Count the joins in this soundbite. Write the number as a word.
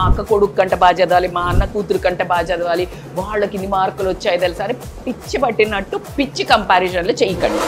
zero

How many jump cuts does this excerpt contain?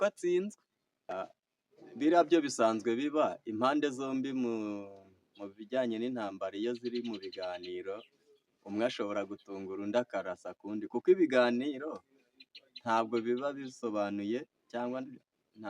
one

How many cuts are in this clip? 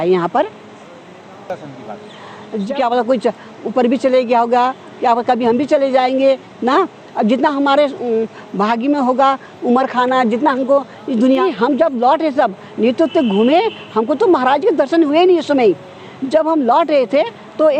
two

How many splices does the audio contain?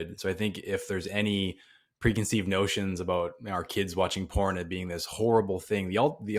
zero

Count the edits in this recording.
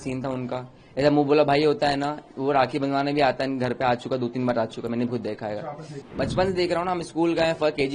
one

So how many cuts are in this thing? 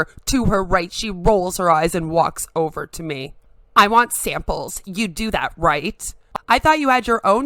one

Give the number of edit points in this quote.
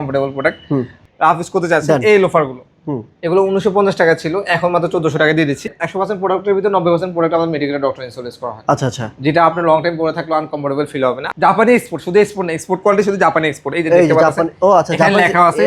three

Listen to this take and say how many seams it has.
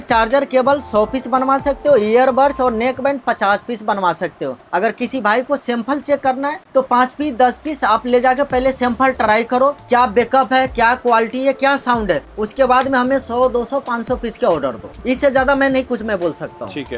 zero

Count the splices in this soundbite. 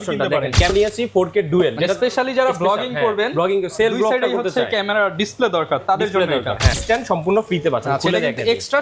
two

